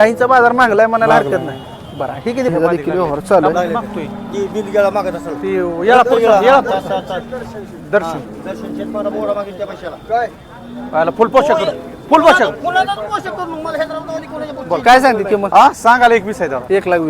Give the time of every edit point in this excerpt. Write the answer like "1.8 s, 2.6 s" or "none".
2.5 s